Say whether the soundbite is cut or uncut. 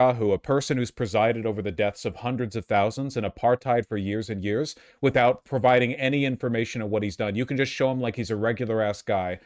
cut